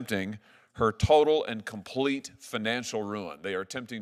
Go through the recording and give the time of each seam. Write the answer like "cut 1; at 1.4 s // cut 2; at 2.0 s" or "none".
none